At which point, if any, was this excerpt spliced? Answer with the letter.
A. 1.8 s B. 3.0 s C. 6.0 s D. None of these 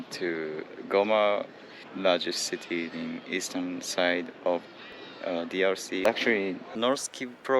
C